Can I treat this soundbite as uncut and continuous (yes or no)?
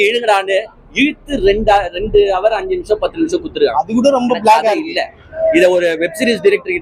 yes